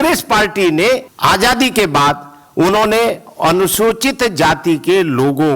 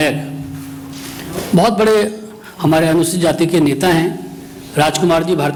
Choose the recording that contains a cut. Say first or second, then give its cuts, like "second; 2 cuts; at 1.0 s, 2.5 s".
first; 1 cut; at 1.0 s